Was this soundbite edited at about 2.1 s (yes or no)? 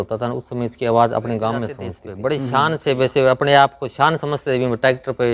yes